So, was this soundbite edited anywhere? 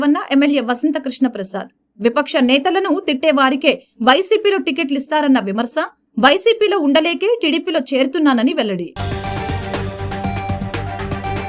no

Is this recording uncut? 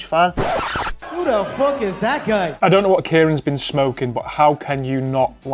yes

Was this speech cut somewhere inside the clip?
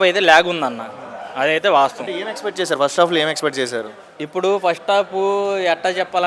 no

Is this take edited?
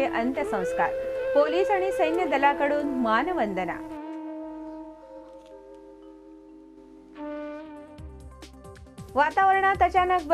no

